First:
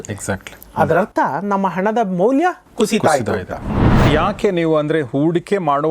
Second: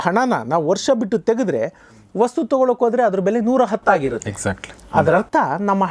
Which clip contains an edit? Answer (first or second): first